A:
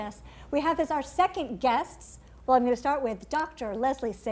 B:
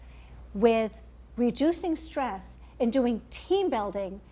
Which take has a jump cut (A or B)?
B